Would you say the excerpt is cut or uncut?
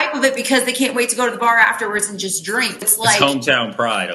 cut